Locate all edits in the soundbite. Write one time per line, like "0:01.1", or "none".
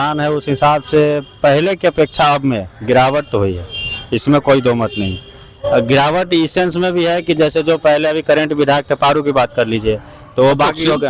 none